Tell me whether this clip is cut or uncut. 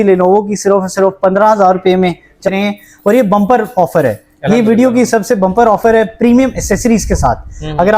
cut